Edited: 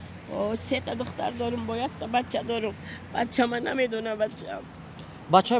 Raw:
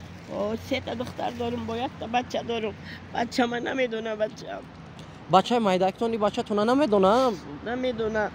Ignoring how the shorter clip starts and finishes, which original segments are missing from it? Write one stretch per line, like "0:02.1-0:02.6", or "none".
none